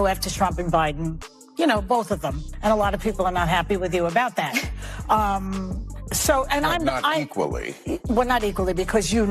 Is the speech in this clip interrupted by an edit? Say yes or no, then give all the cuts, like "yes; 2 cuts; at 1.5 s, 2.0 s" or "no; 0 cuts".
no; 0 cuts